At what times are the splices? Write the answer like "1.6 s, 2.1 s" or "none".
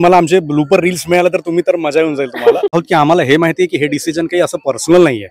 2.8 s